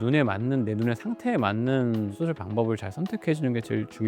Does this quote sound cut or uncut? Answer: cut